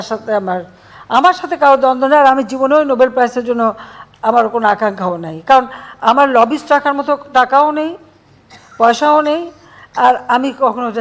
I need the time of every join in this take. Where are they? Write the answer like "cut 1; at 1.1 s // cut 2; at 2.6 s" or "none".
none